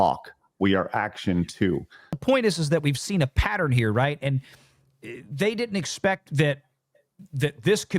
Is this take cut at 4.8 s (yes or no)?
no